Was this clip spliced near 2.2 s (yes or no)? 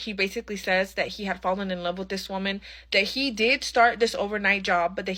no